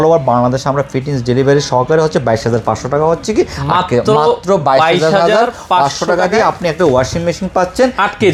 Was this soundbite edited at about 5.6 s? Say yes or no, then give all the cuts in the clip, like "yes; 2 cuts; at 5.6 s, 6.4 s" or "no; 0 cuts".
no; 0 cuts